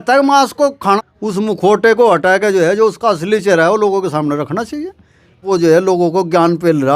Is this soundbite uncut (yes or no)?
no